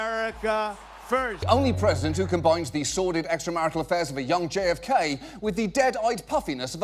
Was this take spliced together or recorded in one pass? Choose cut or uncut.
cut